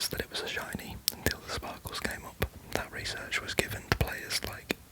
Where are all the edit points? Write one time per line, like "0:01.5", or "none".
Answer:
0:02.6